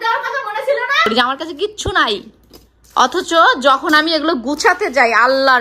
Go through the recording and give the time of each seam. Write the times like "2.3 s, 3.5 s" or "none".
1.1 s

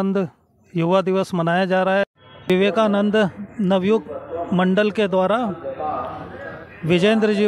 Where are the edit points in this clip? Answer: 2.4 s

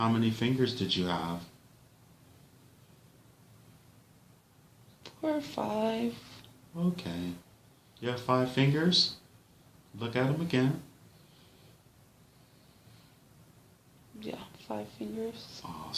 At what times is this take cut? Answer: 14.5 s

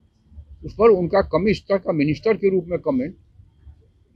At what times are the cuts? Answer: none

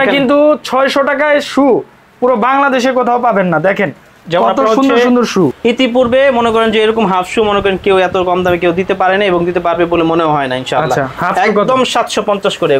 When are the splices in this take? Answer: 5.6 s

